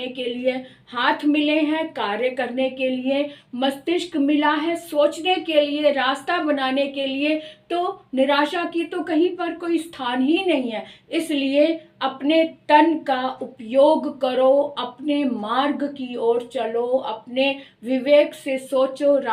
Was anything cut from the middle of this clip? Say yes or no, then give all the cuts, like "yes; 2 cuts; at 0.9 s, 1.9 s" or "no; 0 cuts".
no; 0 cuts